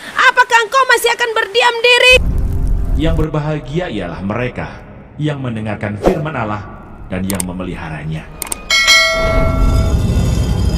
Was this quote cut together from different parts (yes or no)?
yes